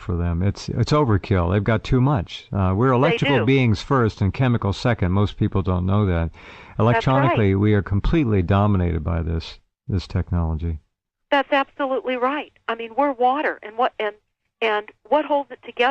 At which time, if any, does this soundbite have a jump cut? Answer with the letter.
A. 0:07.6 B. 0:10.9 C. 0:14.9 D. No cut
B